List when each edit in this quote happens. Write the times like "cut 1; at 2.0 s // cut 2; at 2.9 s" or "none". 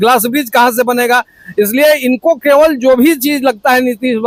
none